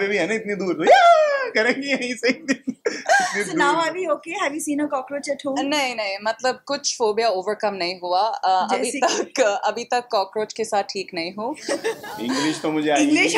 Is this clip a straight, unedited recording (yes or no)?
no